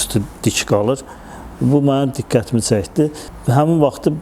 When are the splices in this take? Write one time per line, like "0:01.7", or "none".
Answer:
0:03.3